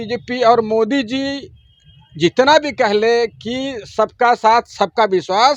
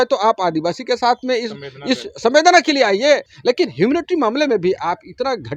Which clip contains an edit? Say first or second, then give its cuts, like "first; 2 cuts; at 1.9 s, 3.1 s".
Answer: second; 1 cut; at 3.3 s